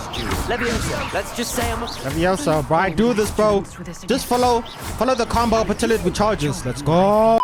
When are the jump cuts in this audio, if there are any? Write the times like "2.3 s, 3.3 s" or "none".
none